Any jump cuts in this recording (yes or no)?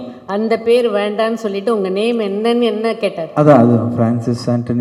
no